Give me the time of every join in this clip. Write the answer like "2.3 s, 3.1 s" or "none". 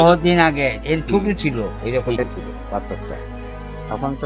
none